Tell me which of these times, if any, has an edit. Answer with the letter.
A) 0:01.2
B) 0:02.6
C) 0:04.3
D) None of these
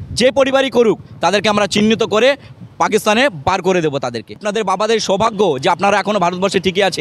C